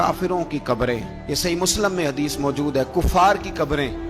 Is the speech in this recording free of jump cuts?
yes; 0 cuts

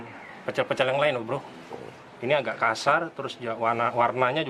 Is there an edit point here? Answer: no; 0 cuts

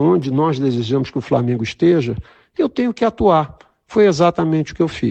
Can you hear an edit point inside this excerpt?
yes; 1 cut; at 4.1 s

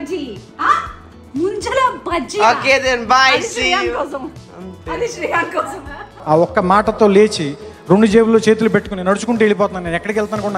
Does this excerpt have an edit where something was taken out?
no; 0 cuts

